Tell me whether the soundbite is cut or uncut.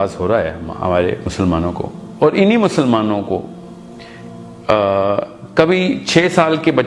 uncut